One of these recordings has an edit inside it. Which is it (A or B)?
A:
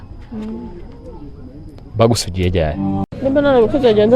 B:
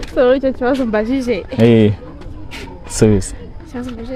A